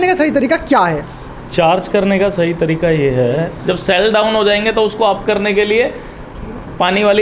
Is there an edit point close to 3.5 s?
yes; 1 cut; at 3.5 s

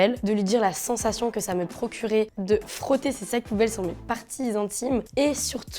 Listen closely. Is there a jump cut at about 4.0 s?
no; 1 cut; at 2.3 s

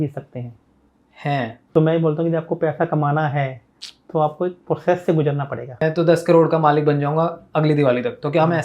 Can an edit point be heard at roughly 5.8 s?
yes; 2 cuts; at 1.6 s, 5.8 s

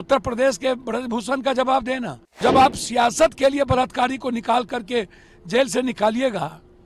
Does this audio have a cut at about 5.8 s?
no; 1 cut; at 2.4 s

